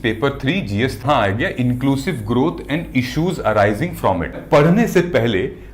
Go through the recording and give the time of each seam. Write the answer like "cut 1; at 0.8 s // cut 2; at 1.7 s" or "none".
cut 1; at 1.0 s // cut 2; at 4.4 s